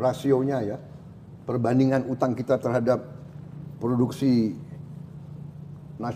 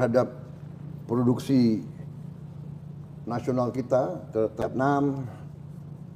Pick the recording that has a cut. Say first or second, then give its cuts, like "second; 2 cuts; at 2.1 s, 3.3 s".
second; 1 cut; at 4.6 s